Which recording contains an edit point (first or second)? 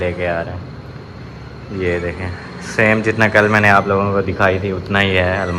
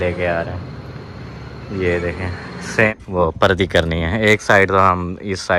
second